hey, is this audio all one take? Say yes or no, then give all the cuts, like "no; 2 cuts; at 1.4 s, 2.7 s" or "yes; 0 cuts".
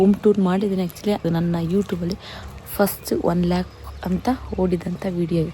no; 1 cut; at 1.2 s